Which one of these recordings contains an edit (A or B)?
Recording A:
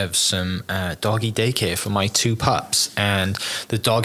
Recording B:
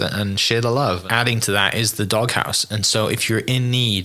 B